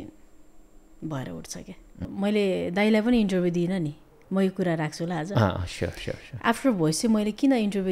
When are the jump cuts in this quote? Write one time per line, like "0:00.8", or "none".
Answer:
0:02.0

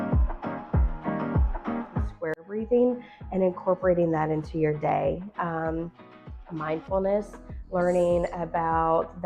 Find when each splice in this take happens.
0:02.1

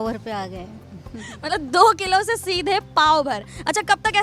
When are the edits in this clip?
none

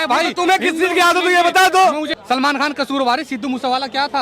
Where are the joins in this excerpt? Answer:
0:02.1

